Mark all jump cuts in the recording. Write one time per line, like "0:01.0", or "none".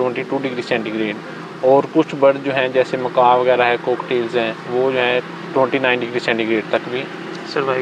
none